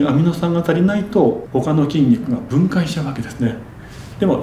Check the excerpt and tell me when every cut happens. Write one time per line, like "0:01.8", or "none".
0:01.4